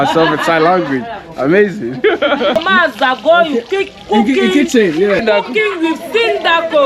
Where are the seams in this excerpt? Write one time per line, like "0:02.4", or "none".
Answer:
0:02.6
0:05.2